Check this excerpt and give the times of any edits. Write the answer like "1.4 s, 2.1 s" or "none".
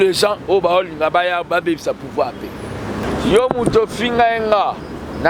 3.0 s